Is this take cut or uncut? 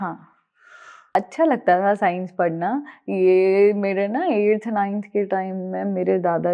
cut